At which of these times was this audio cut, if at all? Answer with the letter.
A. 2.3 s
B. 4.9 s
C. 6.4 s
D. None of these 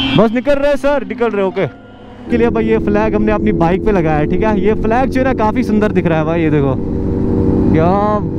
A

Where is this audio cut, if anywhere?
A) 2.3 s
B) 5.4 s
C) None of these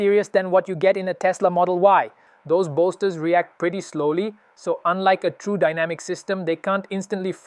A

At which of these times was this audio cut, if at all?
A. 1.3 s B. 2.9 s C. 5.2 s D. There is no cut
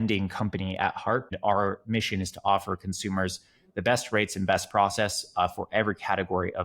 A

